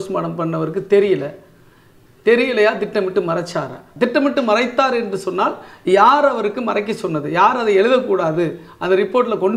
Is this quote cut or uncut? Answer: cut